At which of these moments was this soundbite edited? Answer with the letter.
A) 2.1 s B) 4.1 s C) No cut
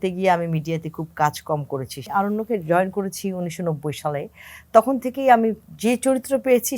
A